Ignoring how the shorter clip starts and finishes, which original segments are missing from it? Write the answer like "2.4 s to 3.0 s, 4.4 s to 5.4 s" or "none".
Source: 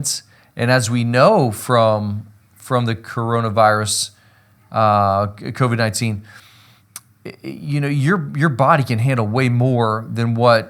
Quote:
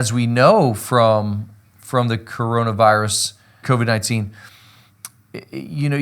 4.3 s to 5.4 s